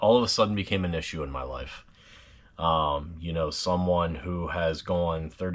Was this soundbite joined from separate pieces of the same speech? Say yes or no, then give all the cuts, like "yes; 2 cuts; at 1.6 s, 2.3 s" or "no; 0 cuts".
no; 0 cuts